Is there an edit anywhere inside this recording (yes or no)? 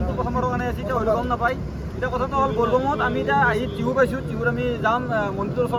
no